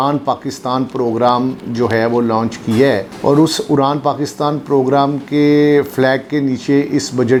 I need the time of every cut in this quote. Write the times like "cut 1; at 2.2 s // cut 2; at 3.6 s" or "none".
none